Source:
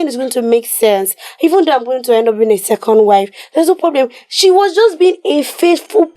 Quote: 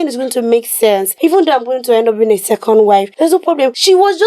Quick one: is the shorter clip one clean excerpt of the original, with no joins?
no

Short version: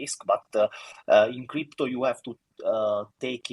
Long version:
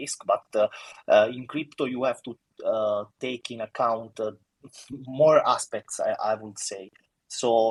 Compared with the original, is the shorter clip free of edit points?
yes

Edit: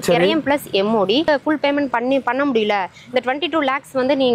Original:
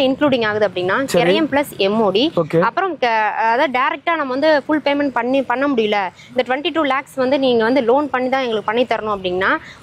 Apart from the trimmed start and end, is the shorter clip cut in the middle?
yes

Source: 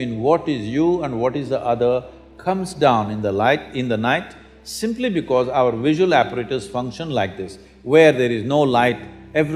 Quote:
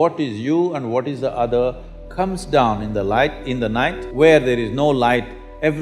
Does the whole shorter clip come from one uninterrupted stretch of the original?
no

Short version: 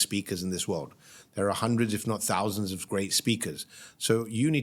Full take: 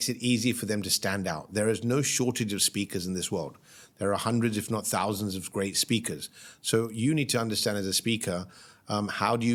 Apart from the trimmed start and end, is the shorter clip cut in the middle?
no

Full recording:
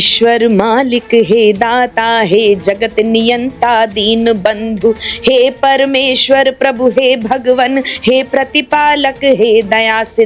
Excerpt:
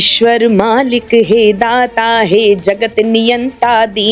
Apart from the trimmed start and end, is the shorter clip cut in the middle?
no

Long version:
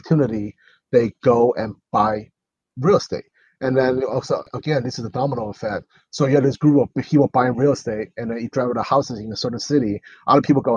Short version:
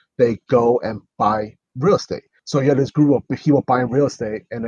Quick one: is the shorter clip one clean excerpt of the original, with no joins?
no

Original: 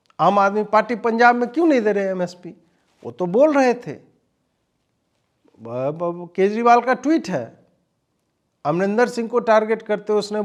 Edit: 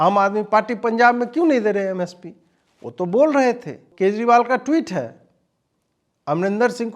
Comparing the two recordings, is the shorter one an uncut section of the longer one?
no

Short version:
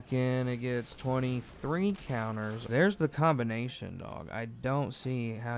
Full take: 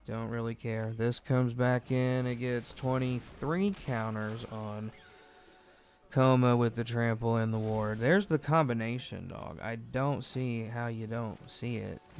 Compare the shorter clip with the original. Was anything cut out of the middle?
yes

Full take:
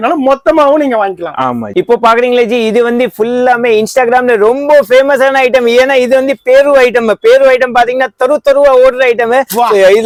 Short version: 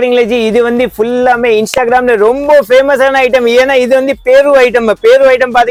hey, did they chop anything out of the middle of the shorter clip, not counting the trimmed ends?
no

